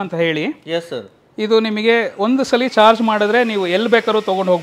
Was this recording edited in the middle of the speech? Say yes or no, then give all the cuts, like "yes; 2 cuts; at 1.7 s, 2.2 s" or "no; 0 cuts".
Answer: no; 0 cuts